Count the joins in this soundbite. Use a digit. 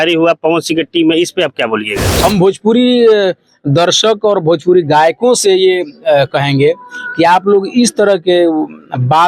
1